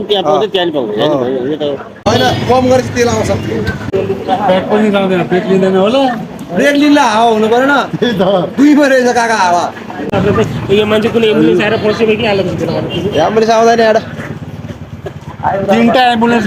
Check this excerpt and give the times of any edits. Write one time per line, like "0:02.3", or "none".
0:02.1
0:03.8
0:10.1